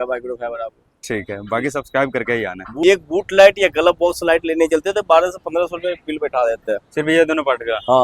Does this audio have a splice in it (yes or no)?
yes